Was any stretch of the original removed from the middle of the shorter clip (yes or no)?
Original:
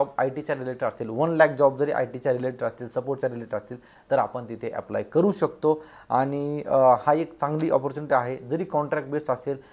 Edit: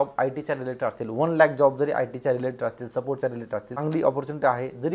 yes